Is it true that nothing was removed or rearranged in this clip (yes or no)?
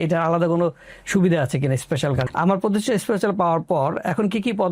no